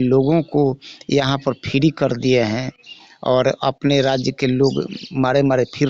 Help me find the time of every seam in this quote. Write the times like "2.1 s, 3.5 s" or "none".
none